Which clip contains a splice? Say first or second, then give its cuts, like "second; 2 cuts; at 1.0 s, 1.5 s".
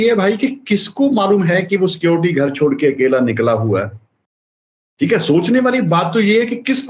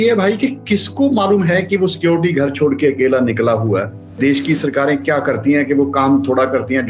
second; 1 cut; at 4.2 s